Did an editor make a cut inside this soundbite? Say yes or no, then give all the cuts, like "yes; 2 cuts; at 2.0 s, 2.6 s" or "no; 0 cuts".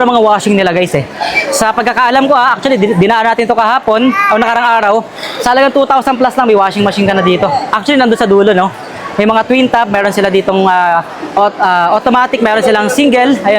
no; 0 cuts